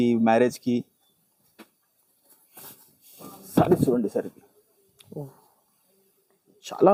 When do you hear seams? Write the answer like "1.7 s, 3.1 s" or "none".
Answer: none